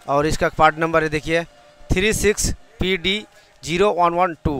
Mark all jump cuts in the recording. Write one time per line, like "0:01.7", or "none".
none